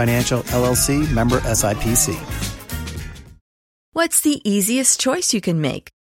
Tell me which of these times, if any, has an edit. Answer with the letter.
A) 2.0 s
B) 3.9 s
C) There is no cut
B